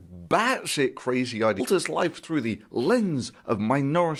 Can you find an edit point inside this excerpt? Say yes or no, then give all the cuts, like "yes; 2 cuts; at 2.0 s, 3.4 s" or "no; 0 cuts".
no; 0 cuts